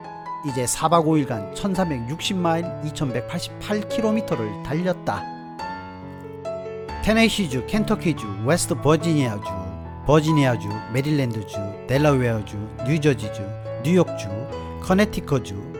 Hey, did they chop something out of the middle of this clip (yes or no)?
no